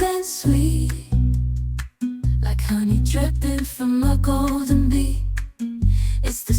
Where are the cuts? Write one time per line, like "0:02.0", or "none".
0:03.4